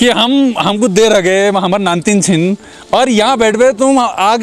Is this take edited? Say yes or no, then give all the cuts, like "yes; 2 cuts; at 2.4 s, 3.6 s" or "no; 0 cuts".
no; 0 cuts